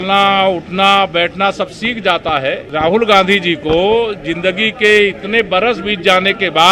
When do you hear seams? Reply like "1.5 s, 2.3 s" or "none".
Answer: 2.6 s